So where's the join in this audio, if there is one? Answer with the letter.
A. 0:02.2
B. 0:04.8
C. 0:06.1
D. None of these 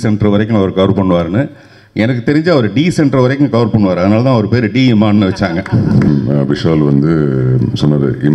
C